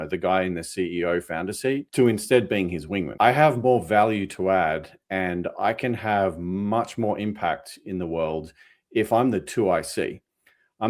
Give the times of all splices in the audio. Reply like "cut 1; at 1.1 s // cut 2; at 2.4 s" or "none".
cut 1; at 1.9 s // cut 2; at 3.1 s